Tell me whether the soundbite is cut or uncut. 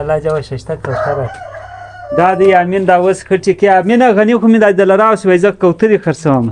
uncut